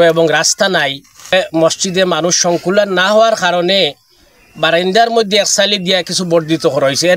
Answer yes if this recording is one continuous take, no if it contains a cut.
no